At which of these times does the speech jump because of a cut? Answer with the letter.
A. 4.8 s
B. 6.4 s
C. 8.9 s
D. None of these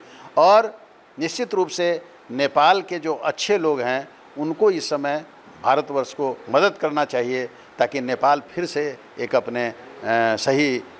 D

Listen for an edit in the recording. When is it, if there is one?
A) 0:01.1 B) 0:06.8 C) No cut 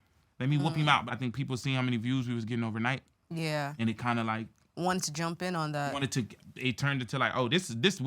A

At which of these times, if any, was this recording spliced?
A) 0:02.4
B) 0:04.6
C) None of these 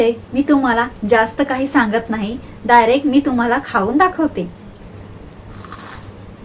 B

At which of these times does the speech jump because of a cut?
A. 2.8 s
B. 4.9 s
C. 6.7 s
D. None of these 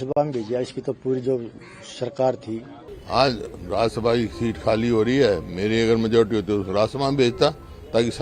A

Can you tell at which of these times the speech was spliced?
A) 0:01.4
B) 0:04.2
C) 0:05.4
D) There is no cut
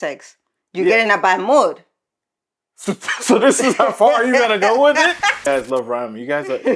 C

